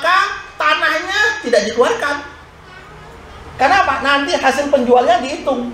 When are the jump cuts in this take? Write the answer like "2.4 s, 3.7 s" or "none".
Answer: none